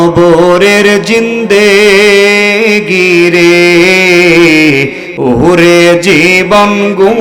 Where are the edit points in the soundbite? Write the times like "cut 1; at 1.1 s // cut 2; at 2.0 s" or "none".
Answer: none